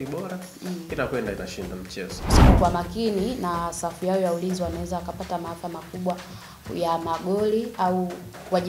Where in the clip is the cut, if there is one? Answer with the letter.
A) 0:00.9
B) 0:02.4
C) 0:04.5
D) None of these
B